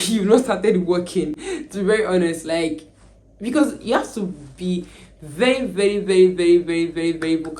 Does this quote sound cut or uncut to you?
uncut